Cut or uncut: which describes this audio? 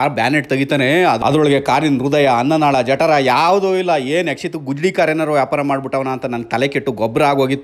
uncut